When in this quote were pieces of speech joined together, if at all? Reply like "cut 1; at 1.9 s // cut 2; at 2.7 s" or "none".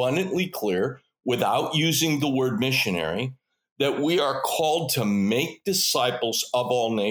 none